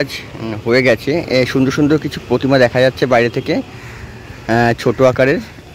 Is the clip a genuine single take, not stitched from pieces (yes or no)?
yes